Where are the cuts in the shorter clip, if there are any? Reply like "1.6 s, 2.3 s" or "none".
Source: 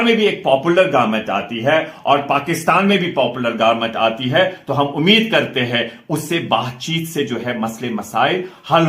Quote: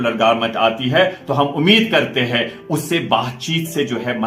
none